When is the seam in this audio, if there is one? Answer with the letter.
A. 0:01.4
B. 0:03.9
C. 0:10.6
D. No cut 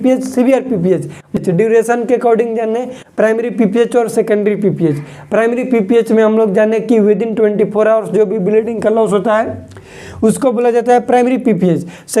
A